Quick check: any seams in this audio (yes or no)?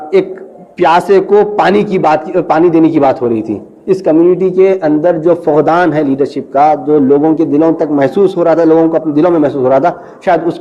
no